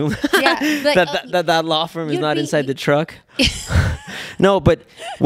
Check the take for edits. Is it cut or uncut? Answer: uncut